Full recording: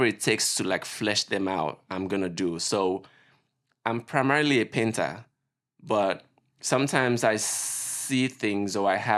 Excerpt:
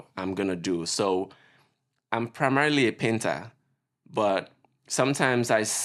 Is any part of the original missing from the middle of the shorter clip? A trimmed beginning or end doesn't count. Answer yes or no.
no